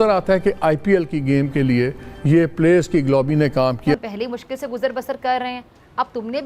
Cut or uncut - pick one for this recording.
cut